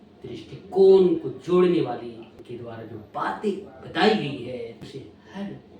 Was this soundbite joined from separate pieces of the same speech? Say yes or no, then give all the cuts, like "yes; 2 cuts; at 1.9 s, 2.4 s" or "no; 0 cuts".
yes; 2 cuts; at 2.4 s, 4.9 s